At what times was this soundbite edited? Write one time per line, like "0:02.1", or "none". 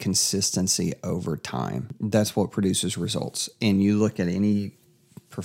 0:02.0